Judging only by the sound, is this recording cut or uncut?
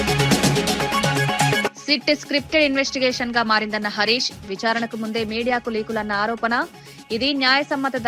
cut